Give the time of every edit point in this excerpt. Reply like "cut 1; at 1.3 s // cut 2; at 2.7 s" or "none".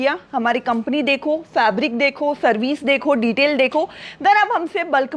none